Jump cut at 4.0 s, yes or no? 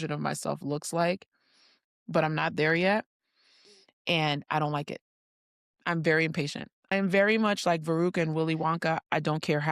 no